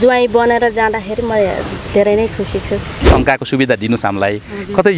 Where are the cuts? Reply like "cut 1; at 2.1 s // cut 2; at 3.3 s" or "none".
cut 1; at 3.1 s

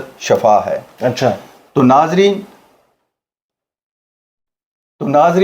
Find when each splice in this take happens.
none

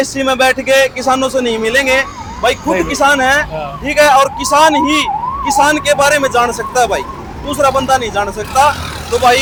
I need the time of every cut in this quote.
none

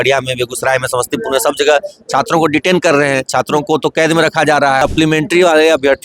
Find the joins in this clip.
cut 1; at 4.8 s

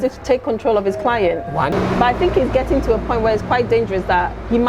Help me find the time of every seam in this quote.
cut 1; at 1.7 s

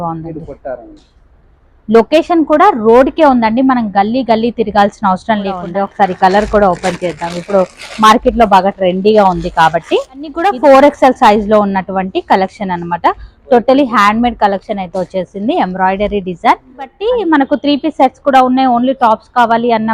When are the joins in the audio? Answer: cut 1; at 5.7 s // cut 2; at 10.4 s // cut 3; at 17.0 s

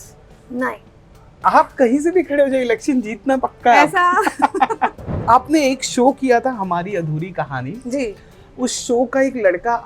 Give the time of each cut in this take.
cut 1; at 1.3 s // cut 2; at 5.1 s

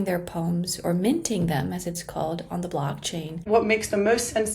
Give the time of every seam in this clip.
cut 1; at 3.4 s

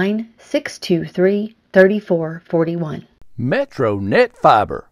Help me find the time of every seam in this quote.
cut 1; at 3.2 s

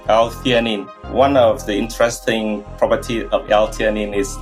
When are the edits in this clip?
cut 1; at 0.9 s

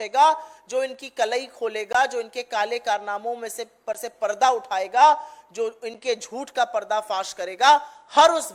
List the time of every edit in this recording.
none

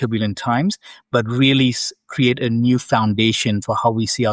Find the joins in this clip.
none

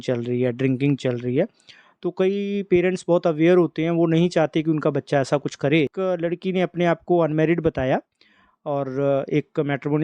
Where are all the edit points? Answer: cut 1; at 5.9 s

